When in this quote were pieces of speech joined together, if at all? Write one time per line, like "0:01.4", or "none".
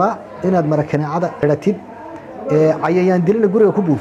0:01.3